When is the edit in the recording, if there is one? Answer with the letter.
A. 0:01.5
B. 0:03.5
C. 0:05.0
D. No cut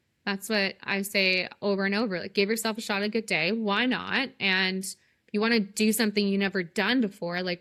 D